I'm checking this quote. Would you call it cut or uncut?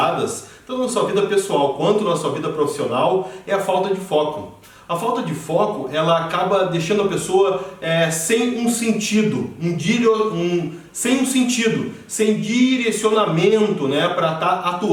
uncut